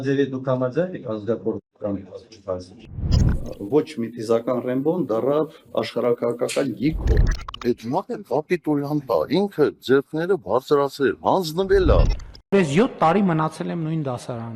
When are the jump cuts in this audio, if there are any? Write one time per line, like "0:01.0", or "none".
none